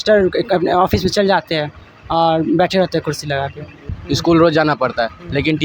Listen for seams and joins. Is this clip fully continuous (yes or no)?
no